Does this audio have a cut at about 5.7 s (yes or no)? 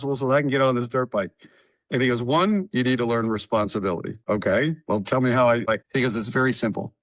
yes